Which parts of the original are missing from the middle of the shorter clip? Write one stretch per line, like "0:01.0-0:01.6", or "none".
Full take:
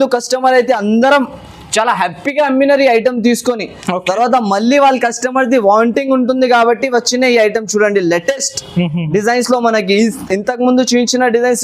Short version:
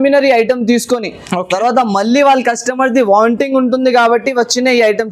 none